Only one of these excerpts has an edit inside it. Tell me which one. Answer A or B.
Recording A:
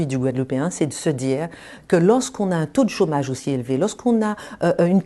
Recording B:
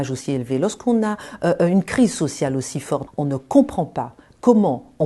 B